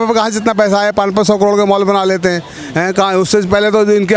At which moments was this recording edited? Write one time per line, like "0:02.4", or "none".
none

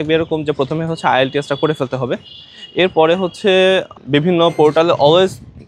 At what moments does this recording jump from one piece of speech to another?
none

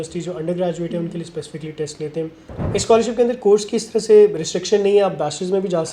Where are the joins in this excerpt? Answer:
0:02.5

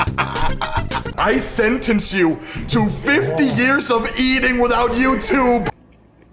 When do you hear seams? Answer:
0:01.0

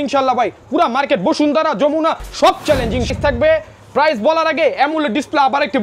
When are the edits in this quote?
0:03.1

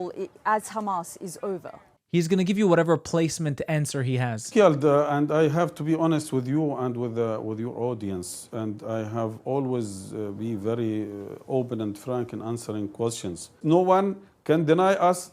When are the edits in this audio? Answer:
0:02.0
0:13.6

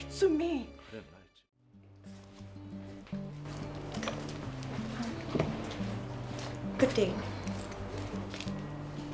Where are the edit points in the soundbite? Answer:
0:01.9

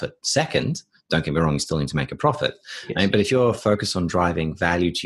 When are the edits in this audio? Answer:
none

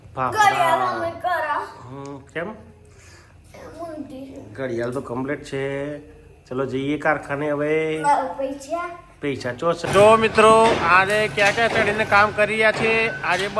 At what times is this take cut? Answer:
0:09.8

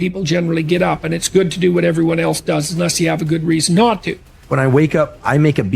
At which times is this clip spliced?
0:04.5

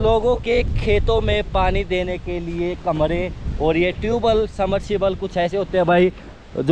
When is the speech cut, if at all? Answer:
none

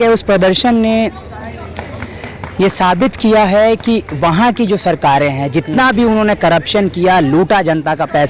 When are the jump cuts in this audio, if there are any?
none

